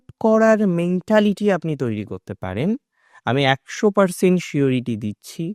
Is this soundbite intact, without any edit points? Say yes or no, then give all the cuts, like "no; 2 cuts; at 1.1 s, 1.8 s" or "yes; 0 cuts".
yes; 0 cuts